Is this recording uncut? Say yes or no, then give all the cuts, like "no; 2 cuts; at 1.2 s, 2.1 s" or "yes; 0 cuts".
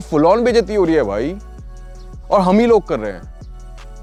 yes; 0 cuts